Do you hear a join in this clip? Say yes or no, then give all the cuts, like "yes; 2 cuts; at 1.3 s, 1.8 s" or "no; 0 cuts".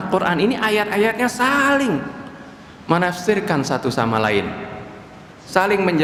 no; 0 cuts